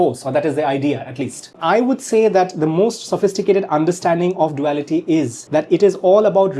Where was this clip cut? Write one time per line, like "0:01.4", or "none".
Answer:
0:01.5
0:05.4